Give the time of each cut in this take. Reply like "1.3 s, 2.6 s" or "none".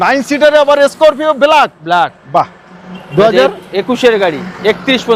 none